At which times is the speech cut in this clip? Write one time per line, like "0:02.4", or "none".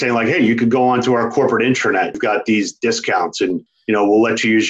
0:02.2
0:03.7